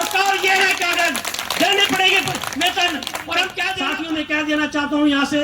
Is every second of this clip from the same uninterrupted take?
no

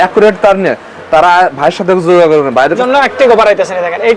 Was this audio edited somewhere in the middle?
yes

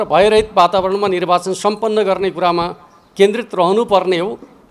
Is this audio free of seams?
yes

